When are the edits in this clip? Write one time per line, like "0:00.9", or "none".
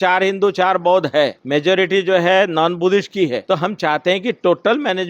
0:01.4
0:03.4